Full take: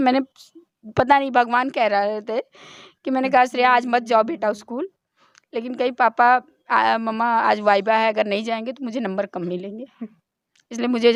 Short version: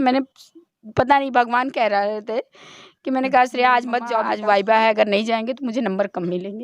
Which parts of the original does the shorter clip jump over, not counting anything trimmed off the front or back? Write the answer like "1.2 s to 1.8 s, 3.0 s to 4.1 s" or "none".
4.3 s to 7.5 s